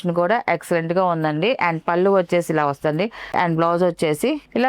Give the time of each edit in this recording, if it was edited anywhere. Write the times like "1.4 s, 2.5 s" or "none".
3.3 s